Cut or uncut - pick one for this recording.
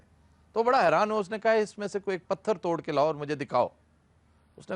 uncut